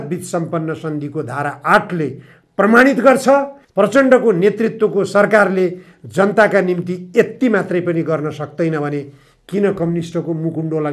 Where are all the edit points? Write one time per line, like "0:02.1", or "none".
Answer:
0:03.6